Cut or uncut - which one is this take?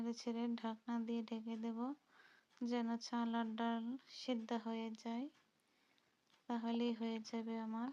uncut